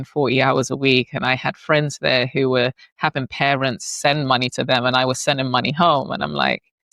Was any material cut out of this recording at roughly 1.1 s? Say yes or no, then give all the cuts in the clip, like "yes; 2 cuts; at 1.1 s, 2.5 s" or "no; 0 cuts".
no; 0 cuts